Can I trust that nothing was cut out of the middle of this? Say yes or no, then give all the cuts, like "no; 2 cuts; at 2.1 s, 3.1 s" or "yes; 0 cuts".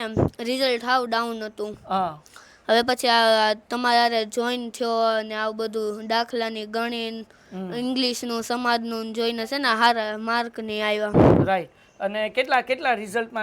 yes; 0 cuts